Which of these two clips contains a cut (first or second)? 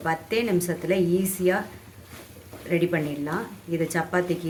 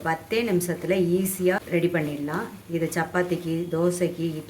second